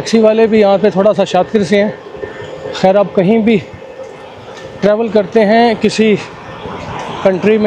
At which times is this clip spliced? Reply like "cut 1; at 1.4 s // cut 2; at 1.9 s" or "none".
none